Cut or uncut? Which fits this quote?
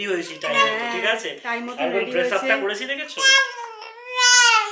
uncut